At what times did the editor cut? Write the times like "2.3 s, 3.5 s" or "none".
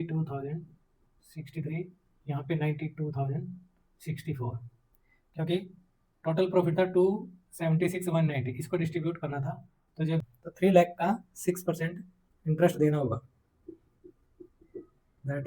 10.2 s

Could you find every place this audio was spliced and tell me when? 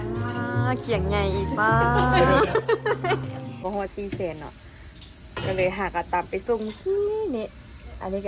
3.6 s

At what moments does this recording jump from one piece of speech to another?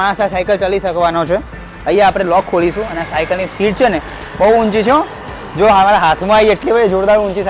none

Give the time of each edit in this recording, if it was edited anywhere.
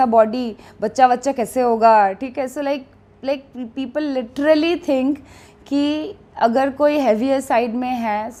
none

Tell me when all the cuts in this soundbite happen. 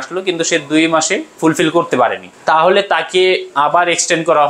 2.3 s, 3.5 s

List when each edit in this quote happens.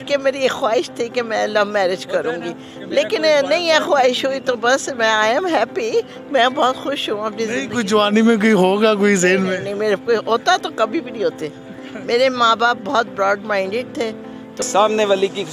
14.6 s

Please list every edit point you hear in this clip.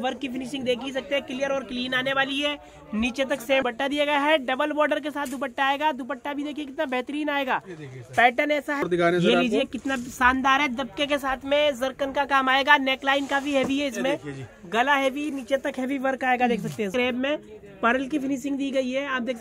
3.6 s, 8.8 s, 16.9 s

